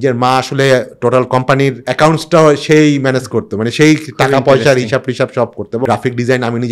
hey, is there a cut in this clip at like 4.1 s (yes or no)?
no